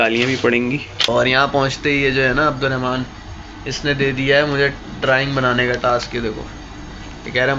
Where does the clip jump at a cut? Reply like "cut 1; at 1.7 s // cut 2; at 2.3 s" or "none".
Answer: cut 1; at 1.1 s